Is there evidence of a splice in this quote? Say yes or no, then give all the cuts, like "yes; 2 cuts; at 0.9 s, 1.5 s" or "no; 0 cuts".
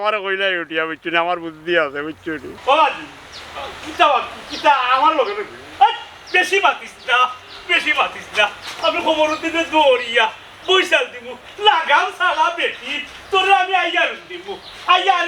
yes; 1 cut; at 2.5 s